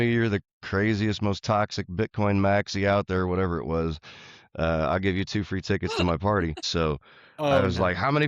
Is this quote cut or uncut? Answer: cut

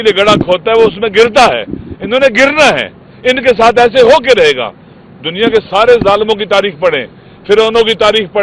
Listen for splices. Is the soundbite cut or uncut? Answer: uncut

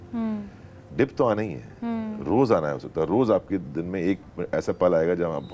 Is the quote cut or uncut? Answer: uncut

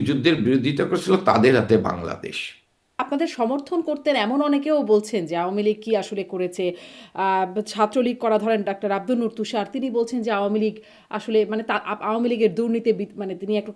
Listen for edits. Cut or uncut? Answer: cut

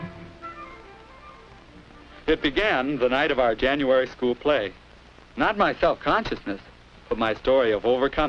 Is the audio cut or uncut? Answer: cut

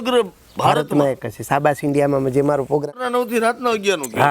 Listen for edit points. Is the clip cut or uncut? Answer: cut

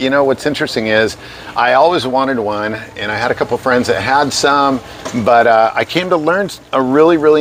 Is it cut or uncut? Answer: uncut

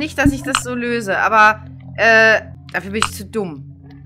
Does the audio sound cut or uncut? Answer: cut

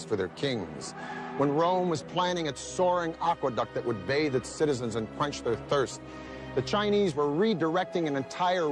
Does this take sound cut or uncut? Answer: uncut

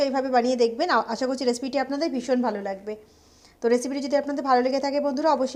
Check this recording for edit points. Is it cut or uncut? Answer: uncut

